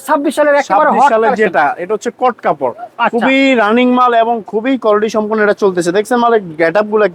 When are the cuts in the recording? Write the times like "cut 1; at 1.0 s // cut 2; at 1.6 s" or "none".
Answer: none